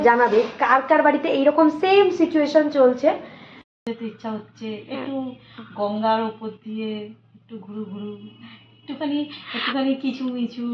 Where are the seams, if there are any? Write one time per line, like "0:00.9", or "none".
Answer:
0:03.8